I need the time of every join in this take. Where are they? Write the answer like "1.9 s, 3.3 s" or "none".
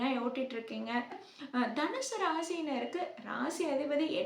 1.3 s